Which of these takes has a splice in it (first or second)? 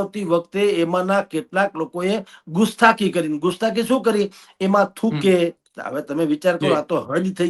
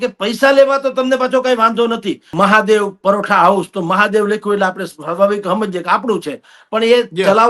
second